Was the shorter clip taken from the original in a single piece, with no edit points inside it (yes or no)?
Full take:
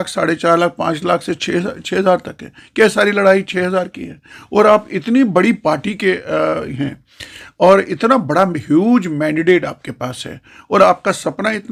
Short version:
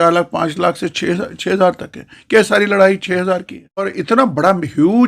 no